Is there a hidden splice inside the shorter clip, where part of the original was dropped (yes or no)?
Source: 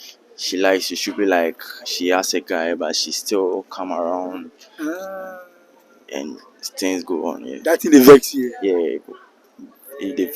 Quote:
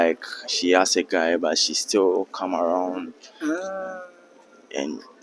no